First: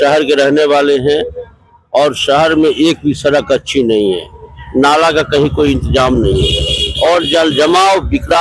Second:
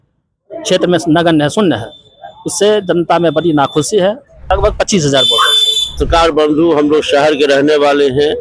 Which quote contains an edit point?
second; 2 cuts; at 4.4 s, 6.0 s

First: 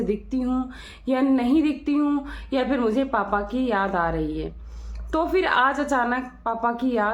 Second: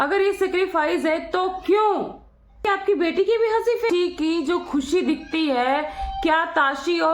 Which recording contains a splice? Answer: second; 2 cuts; at 2.6 s, 3.9 s

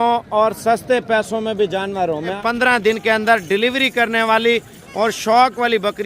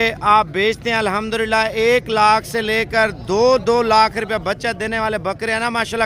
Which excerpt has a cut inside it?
first; 1 cut; at 2.3 s

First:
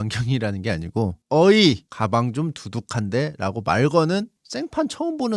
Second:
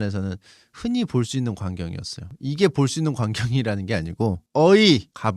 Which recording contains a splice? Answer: second; 1 cut; at 2.3 s

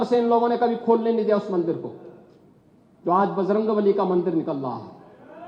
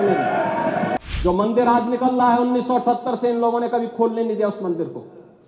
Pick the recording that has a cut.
second; 1 cut; at 1.0 s

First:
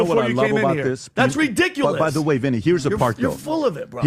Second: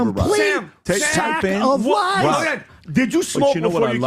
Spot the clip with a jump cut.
second; 1 cut; at 2.7 s

